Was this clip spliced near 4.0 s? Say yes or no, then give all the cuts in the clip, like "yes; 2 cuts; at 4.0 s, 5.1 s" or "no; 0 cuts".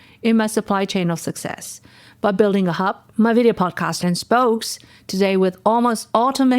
yes; 1 cut; at 4.0 s